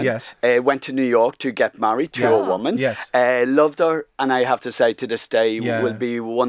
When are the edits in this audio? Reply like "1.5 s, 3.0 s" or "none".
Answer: none

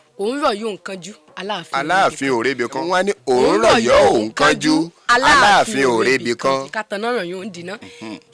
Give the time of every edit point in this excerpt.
2.8 s, 6.7 s

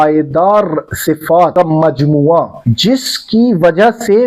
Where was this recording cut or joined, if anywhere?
1.5 s, 2.6 s

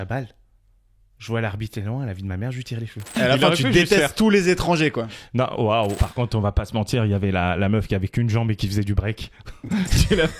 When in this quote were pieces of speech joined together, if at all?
3.2 s, 6.0 s

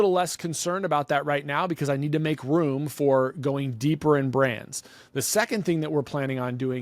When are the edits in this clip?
none

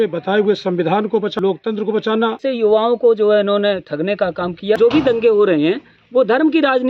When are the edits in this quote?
1.4 s, 2.4 s, 4.8 s

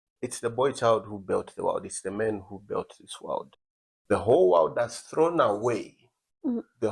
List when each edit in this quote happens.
3.5 s

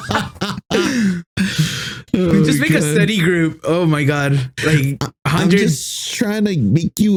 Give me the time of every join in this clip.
none

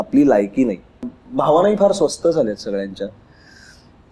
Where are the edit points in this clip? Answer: 1.2 s

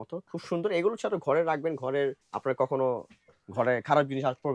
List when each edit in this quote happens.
2.3 s

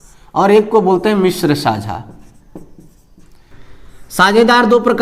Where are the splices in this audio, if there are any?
3.5 s

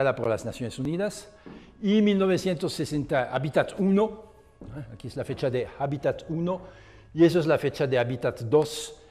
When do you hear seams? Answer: 7.1 s

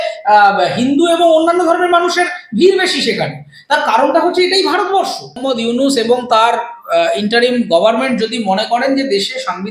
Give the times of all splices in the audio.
5.4 s

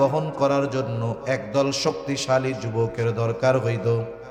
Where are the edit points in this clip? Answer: none

